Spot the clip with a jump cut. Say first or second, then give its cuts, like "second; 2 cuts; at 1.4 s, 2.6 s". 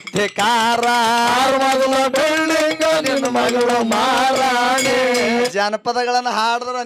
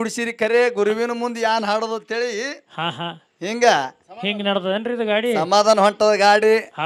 first; 1 cut; at 5.5 s